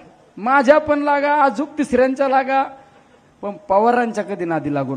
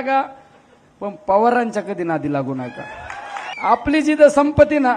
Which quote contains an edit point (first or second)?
second